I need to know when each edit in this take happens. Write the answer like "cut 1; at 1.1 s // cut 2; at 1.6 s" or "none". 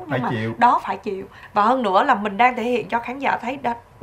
cut 1; at 1.3 s